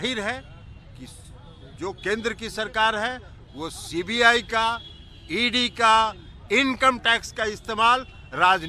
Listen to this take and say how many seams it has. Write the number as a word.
zero